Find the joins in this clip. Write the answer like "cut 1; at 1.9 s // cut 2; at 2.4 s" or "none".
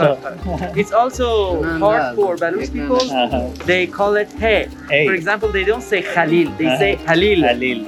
none